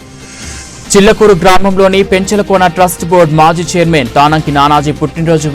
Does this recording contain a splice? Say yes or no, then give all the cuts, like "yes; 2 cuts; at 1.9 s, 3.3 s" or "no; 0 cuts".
yes; 1 cut; at 0.9 s